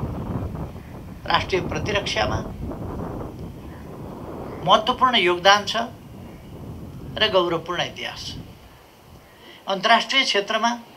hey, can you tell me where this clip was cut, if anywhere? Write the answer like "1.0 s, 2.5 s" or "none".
none